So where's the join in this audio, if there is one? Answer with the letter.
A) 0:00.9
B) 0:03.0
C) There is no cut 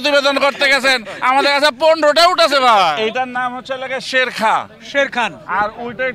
B